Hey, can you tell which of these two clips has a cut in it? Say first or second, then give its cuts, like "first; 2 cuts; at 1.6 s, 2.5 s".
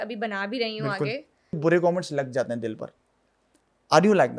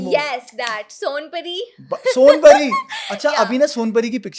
first; 1 cut; at 1.6 s